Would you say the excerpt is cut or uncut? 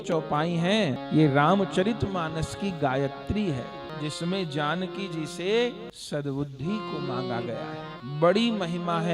cut